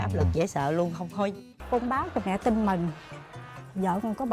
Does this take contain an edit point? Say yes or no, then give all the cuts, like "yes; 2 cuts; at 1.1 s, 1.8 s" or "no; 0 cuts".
yes; 1 cut; at 1.6 s